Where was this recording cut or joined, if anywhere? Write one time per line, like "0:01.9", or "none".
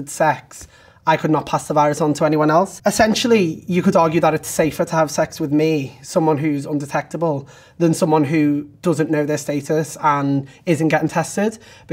0:02.7

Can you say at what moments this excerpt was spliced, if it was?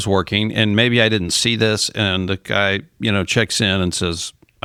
none

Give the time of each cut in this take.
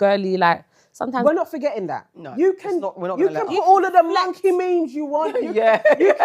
0:01.2

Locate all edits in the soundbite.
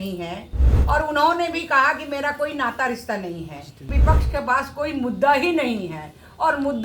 0:03.9

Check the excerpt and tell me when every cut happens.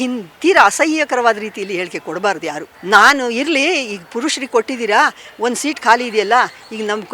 0:02.7

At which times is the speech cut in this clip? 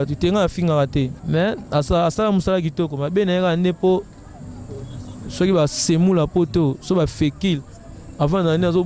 0:01.2

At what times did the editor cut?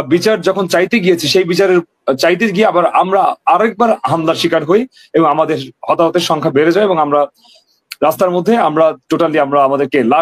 none

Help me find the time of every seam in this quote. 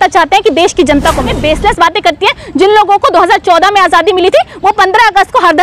0:01.3

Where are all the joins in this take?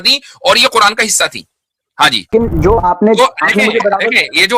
0:02.3

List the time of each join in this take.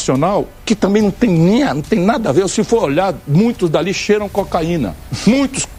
none

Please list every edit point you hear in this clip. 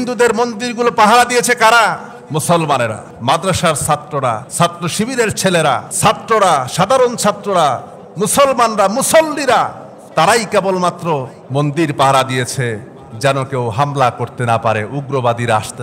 0:02.1
0:03.1
0:04.5
0:05.9
0:11.4

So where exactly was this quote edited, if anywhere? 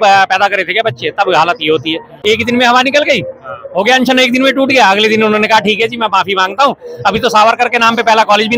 0:02.1

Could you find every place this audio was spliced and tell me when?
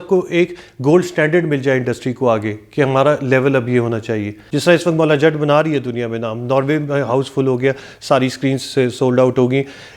0:04.4

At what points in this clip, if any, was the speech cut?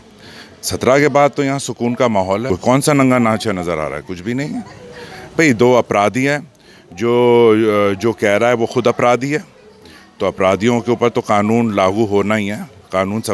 0:02.4

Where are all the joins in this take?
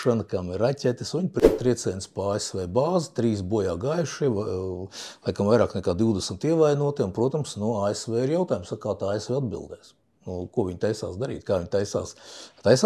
0:01.4

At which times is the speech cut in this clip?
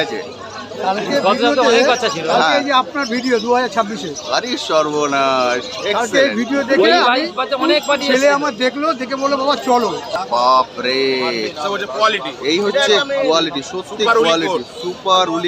0:10.1

